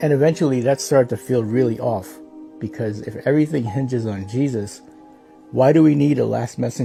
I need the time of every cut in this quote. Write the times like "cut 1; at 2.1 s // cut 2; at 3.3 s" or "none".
none